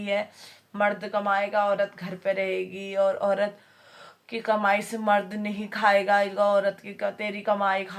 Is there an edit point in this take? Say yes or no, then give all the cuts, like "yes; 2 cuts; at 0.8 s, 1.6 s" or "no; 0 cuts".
no; 0 cuts